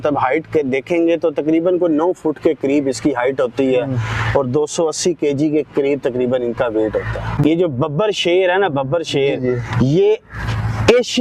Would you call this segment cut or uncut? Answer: cut